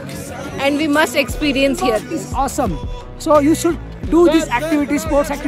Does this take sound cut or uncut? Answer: cut